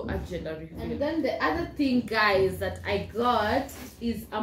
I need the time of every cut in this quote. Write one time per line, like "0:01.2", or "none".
0:00.9

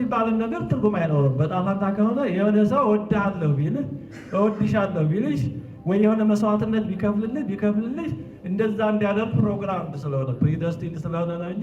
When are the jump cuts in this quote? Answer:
none

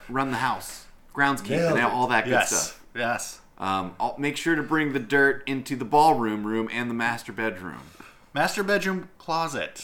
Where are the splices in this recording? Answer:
none

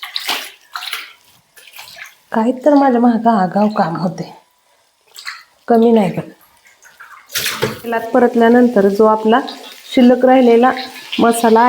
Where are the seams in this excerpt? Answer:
0:07.8

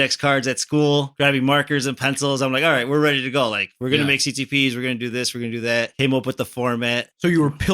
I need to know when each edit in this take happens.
0:01.1
0:05.9

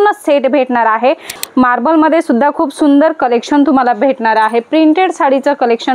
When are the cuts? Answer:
0:01.3

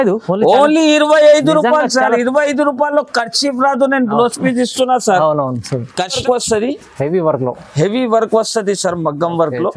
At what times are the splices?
0:06.2

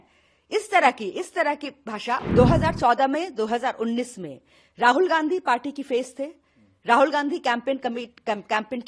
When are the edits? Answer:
0:02.2

